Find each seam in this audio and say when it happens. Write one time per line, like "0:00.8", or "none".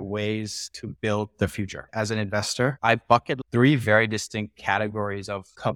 0:01.8
0:03.3